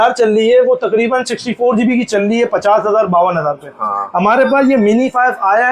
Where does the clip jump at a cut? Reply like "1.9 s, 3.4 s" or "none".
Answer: none